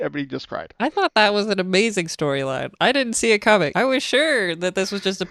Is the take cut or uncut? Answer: cut